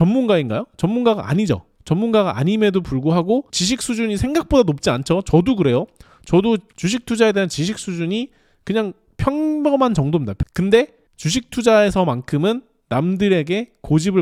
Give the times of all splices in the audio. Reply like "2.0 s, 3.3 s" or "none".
none